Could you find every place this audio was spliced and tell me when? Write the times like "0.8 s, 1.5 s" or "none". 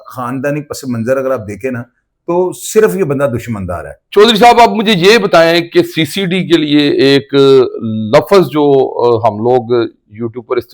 3.9 s